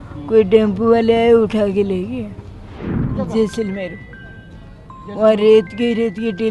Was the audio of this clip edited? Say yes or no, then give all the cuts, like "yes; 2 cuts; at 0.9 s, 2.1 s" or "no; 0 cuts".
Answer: yes; 1 cut; at 2.9 s